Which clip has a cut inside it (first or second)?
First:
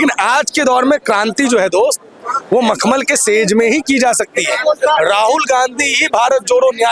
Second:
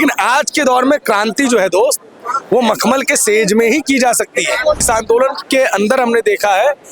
second